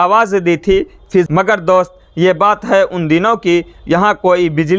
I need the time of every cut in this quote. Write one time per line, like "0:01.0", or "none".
0:01.3